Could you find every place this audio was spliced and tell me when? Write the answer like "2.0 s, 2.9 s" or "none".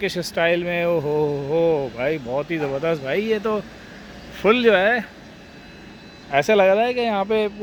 none